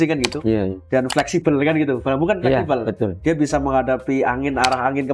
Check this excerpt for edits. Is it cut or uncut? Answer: uncut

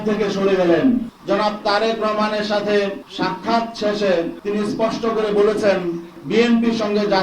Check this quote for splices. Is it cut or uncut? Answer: cut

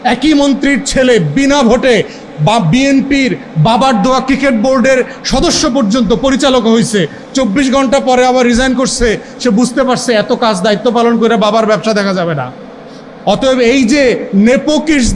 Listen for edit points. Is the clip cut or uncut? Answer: uncut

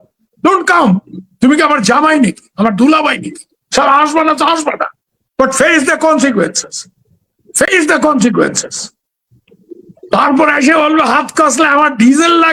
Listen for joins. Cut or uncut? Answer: uncut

